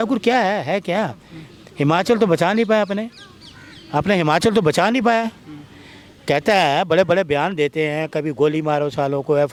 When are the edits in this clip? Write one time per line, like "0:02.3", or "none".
none